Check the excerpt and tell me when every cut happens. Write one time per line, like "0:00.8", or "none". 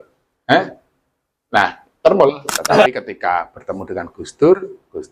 0:02.9